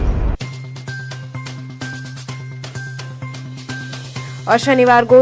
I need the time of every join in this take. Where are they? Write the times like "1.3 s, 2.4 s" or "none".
2.8 s